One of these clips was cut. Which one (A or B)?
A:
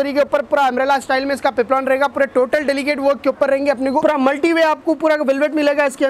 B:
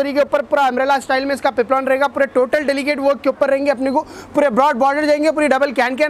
A